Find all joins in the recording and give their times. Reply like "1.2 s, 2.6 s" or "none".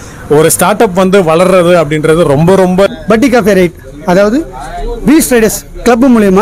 2.9 s